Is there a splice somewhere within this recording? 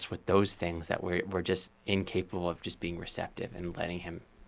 no; 0 cuts

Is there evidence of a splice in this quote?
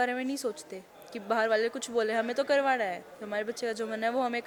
no; 0 cuts

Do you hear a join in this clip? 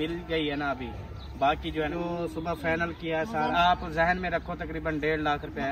yes; 2 cuts; at 1.9 s, 3.5 s

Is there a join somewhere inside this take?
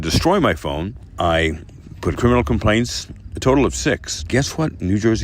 yes; 3 cuts; at 1.1 s, 2.2 s, 4.3 s

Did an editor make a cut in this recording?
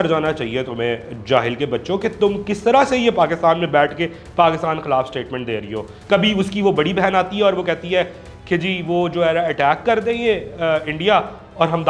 no; 0 cuts

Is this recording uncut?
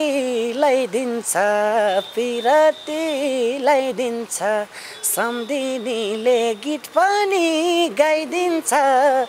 yes; 0 cuts

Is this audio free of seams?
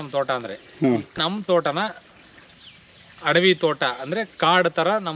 no; 1 cut; at 1.2 s

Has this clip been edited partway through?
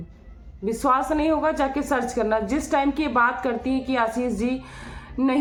no; 0 cuts

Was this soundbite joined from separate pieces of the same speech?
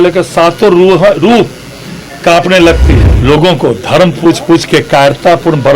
yes; 1 cut; at 3.1 s

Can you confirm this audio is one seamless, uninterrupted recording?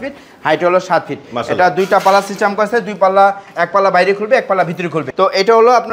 no; 1 cut; at 5.0 s

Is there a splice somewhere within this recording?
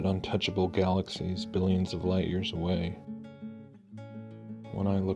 yes; 1 cut; at 1.6 s

